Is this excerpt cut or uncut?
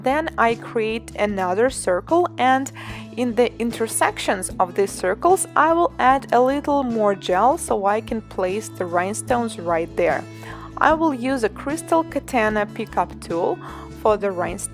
cut